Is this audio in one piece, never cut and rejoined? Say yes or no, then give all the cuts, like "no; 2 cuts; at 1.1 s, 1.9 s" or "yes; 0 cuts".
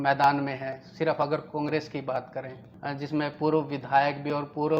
no; 1 cut; at 2.7 s